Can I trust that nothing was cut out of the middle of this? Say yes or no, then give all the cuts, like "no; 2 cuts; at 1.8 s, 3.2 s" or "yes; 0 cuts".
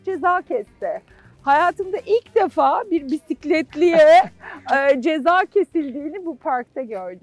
yes; 0 cuts